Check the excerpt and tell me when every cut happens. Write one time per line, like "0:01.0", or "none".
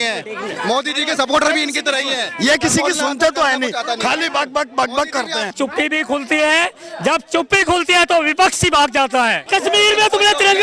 0:05.5
0:09.5